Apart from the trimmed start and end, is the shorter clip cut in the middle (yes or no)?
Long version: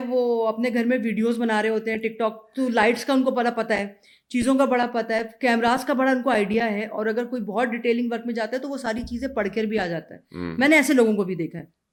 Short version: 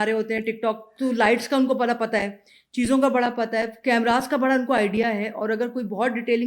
no